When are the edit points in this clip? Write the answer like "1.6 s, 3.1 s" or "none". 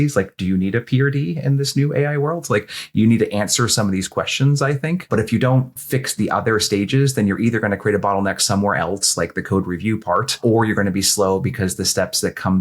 5.1 s, 10.4 s